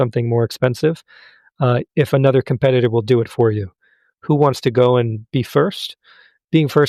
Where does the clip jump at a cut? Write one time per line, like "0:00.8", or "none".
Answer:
none